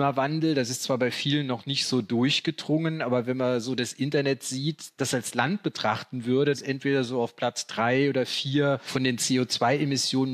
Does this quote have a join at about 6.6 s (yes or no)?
yes